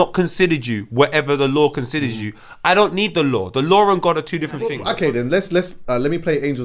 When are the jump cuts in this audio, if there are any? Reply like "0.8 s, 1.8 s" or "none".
4.8 s